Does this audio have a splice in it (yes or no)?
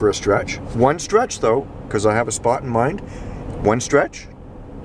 no